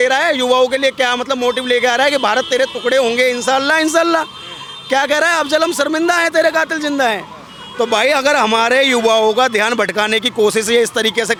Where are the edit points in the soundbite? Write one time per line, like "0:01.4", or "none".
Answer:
none